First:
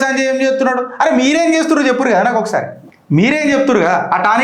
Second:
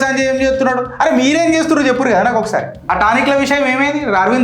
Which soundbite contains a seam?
second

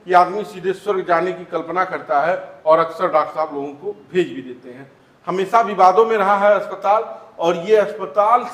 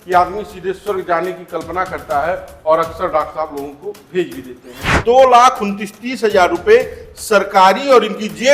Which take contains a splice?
second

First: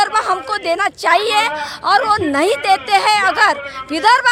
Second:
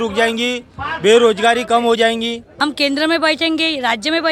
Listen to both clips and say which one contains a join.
second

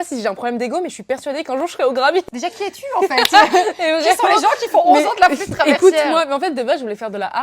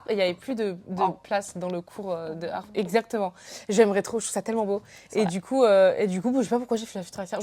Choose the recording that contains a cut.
first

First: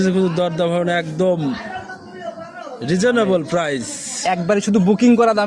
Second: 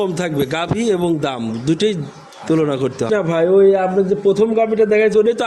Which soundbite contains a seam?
second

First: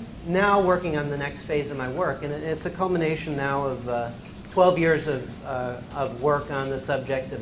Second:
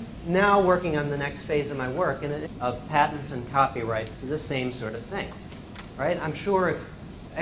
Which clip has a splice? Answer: first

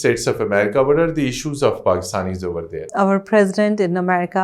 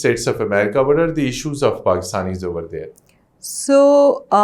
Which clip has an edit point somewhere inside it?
first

